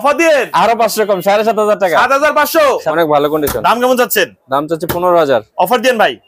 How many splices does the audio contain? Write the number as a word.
one